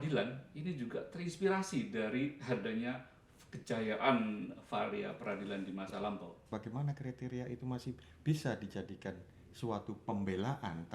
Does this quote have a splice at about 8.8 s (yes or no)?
no